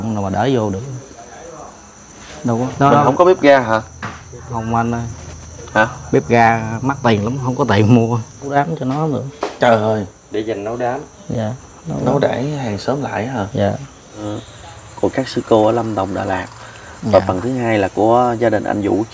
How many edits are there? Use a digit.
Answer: 3